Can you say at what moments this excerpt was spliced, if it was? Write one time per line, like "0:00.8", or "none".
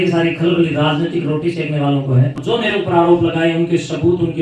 0:02.4